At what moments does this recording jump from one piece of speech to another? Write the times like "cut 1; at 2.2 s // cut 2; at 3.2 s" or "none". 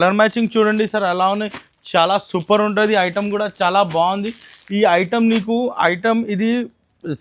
none